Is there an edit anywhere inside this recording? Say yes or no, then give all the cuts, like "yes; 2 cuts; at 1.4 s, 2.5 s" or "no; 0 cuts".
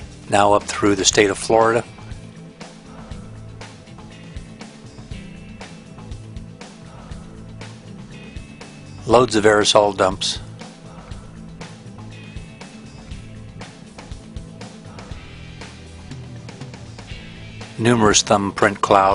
no; 0 cuts